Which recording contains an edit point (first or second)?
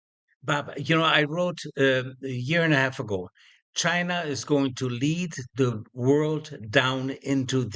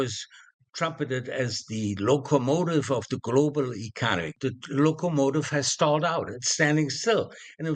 second